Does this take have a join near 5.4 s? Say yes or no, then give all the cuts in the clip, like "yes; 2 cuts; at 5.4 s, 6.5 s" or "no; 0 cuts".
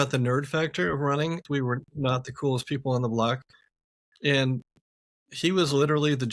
no; 1 cut; at 1.4 s